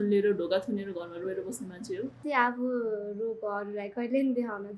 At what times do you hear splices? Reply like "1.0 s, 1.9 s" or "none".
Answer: 2.2 s